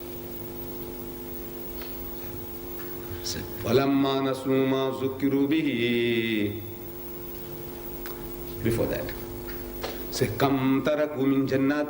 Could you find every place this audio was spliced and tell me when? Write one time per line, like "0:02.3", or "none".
0:07.1